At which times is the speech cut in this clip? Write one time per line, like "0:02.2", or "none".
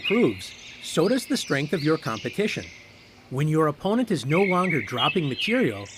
none